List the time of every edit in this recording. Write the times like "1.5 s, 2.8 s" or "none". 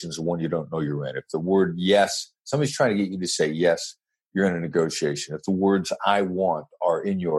none